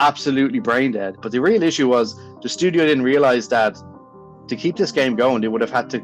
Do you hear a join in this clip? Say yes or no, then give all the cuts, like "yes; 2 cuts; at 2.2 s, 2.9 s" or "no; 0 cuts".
yes; 1 cut; at 1.2 s